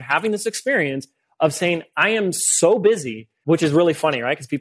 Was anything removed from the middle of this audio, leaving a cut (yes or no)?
yes